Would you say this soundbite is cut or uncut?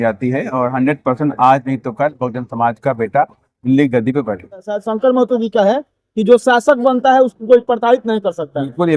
cut